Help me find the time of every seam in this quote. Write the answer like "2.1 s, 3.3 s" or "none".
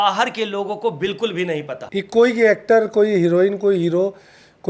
1.8 s